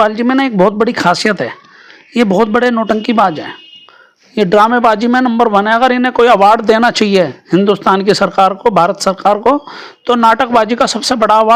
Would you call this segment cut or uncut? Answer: uncut